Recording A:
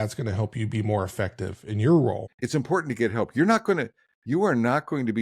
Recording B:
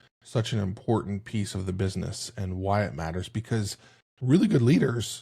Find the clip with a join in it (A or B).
A